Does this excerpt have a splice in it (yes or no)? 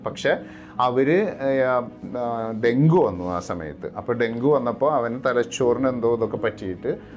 no